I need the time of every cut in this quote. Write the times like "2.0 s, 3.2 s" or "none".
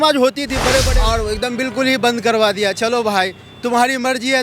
0.9 s